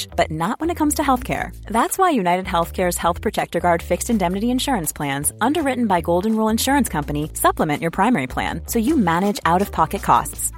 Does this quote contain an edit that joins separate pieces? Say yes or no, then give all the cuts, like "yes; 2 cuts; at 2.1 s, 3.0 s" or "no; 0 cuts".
no; 0 cuts